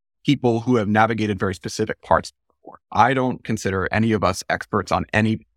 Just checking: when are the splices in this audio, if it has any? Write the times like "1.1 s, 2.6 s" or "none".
2.9 s